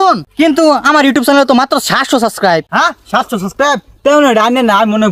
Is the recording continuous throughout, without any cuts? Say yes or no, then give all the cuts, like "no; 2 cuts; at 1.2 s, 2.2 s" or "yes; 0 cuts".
yes; 0 cuts